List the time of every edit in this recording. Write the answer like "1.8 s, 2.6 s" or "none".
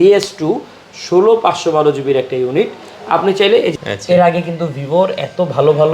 3.8 s

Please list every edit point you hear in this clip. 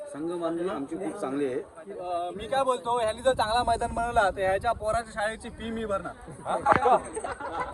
1.8 s

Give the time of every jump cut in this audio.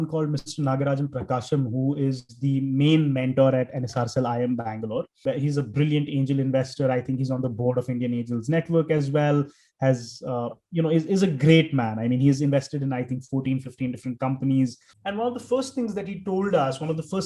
5.2 s

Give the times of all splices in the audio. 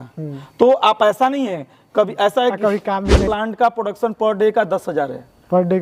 3.2 s

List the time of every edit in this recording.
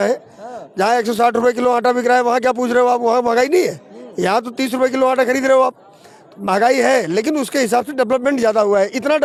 none

